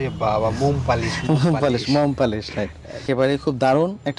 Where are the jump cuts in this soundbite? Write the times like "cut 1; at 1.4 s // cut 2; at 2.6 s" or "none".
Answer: none